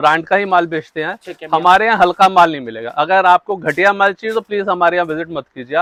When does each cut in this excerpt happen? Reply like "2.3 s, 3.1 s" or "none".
none